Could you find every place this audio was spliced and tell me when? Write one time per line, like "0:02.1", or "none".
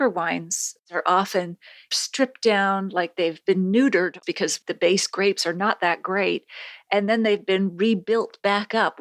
0:00.9
0:01.9
0:04.3